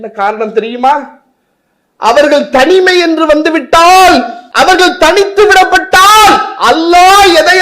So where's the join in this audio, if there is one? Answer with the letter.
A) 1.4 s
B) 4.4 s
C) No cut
B